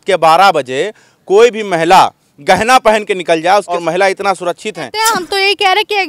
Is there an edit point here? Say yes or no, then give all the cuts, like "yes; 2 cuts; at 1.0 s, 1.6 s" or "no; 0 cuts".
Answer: yes; 2 cuts; at 3.7 s, 4.9 s